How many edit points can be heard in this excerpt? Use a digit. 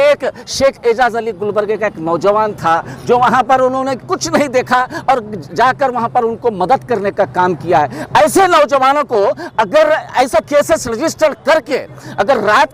0